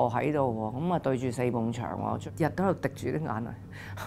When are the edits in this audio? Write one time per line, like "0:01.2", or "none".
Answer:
0:02.2